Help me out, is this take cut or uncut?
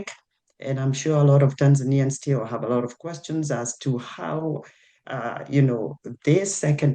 uncut